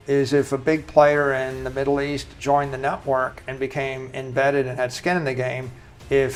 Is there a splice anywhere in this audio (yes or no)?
no